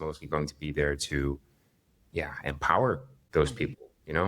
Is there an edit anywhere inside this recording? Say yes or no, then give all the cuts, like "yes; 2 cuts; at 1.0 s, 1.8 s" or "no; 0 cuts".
yes; 1 cut; at 3.1 s